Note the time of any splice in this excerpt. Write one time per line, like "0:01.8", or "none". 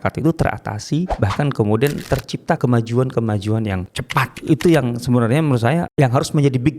0:01.1
0:02.5
0:04.4
0:05.9